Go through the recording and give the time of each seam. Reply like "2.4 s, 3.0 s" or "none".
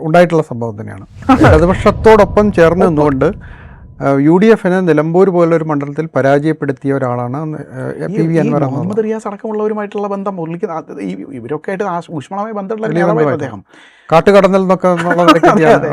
1.2 s